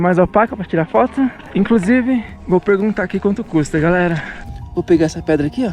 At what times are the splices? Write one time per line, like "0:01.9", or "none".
0:01.4
0:02.3
0:04.3